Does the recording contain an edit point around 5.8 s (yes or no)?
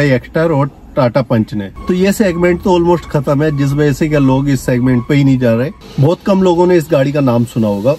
yes